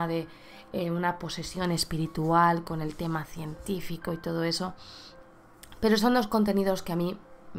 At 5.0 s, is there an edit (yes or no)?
no